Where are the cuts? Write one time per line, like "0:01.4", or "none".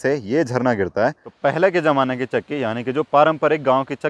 0:01.3